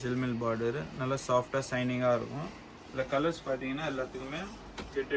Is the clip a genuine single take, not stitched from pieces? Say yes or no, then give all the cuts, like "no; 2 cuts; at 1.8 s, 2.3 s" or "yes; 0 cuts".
yes; 0 cuts